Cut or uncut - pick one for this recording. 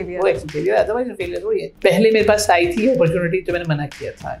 cut